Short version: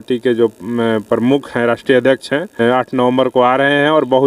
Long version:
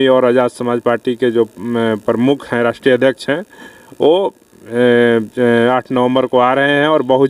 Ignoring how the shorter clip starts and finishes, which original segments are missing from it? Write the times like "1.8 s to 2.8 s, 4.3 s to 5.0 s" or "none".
3.6 s to 5.6 s